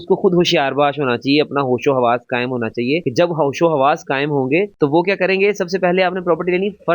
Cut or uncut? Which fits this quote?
uncut